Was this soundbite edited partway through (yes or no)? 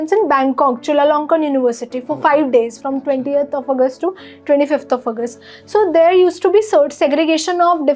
no